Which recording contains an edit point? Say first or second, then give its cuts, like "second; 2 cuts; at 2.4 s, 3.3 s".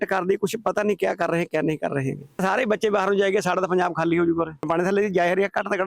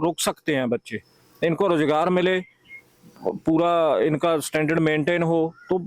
first; 2 cuts; at 2.4 s, 4.7 s